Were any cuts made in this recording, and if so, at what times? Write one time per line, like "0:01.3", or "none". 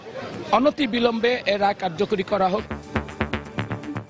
0:02.8

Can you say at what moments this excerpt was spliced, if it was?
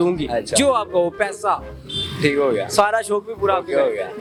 none

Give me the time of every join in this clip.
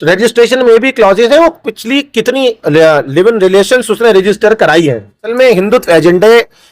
0:05.3

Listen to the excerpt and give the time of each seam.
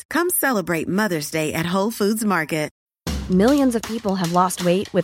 0:02.8

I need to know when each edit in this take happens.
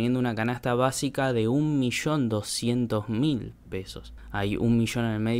none

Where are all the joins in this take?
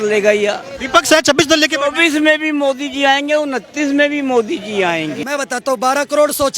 0:05.2

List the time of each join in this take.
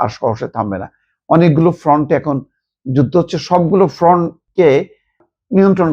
0:04.4

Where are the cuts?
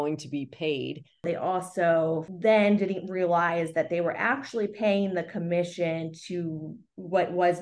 0:01.2
0:02.3

